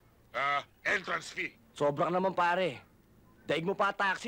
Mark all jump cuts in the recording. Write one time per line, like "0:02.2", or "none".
0:01.6